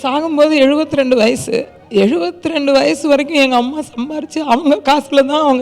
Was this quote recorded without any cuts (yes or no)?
yes